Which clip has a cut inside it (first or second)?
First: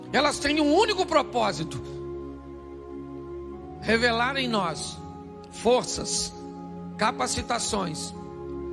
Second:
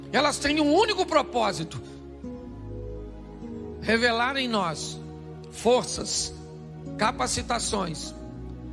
second